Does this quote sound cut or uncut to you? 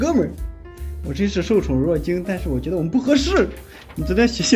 uncut